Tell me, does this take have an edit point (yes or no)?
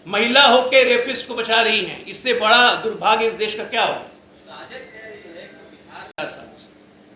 no